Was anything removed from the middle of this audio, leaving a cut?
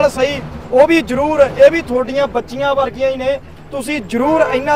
no; 0 cuts

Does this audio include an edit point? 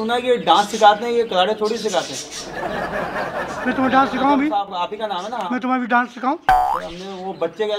no; 0 cuts

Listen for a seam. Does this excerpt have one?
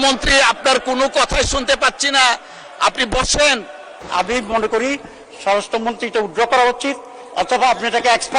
yes; 1 cut; at 3.9 s

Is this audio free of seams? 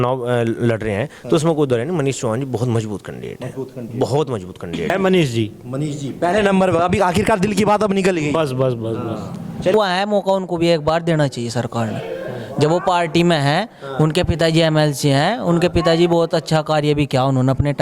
no; 2 cuts; at 4.9 s, 9.7 s

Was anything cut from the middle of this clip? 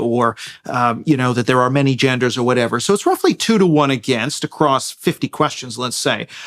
no; 0 cuts

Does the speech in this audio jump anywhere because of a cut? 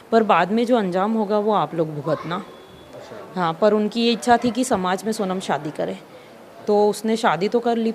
no; 0 cuts

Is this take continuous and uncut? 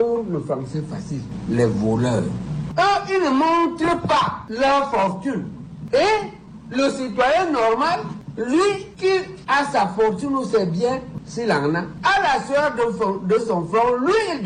yes; 0 cuts

